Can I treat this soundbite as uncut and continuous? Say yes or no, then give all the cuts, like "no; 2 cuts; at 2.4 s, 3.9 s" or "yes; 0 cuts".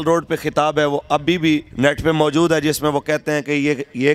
no; 1 cut; at 1.7 s